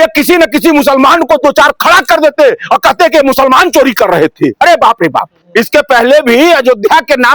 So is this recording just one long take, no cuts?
no; 1 cut; at 5.4 s

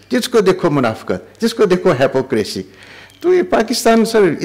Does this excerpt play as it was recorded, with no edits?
yes; 0 cuts

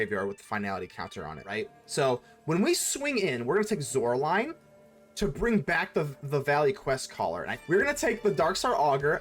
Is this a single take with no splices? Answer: no; 2 cuts; at 1.5 s, 7.5 s

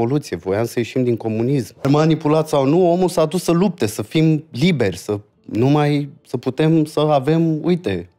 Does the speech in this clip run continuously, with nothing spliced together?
no; 1 cut; at 1.8 s

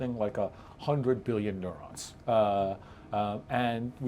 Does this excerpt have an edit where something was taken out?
no; 0 cuts

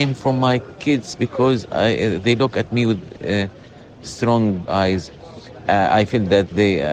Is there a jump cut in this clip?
no; 0 cuts

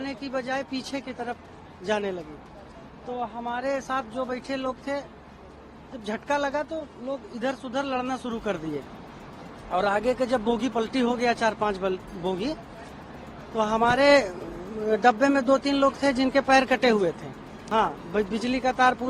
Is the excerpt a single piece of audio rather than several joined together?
no; 1 cut; at 17.6 s

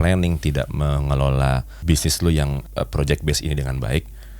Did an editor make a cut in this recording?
yes; 2 cuts; at 1.8 s, 2.6 s

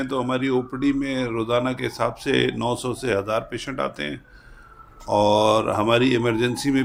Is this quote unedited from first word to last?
yes; 0 cuts

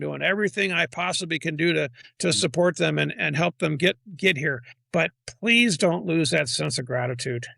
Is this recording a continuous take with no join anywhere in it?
no; 2 cuts; at 2.0 s, 4.7 s

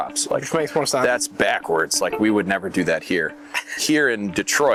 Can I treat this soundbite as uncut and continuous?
yes; 0 cuts

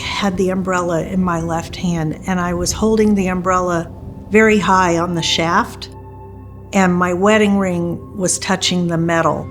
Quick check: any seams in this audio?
no; 0 cuts

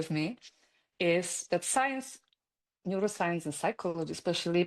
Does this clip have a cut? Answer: no; 0 cuts

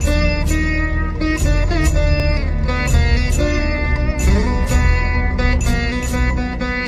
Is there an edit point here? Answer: no; 0 cuts

